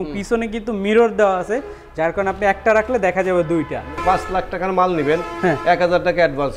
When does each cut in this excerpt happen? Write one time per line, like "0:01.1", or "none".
0:03.9